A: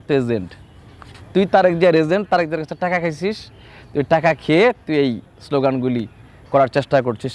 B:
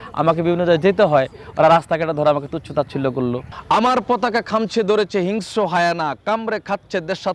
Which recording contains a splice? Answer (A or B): B